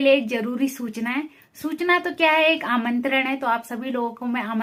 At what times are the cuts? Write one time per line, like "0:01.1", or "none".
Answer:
none